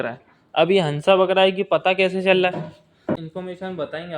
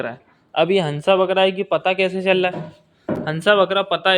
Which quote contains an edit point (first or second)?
first